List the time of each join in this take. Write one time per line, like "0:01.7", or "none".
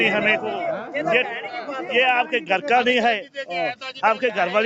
none